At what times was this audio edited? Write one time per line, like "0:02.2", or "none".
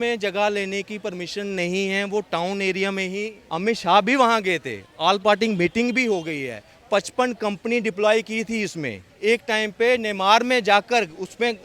0:03.4
0:09.0